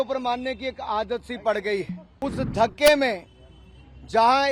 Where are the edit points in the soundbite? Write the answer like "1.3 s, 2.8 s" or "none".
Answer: 2.0 s